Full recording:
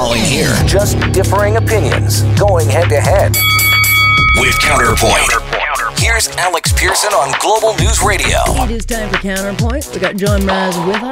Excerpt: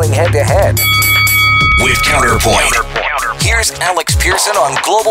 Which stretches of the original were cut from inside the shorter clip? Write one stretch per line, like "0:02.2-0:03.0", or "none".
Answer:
none